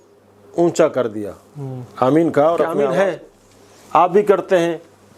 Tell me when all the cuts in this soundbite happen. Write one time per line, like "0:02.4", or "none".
0:02.8